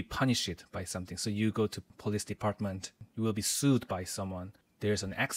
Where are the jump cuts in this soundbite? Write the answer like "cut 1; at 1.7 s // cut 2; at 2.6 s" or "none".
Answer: cut 1; at 3.0 s